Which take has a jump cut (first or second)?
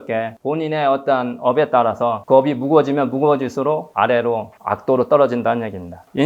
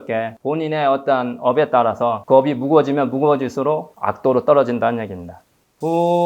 second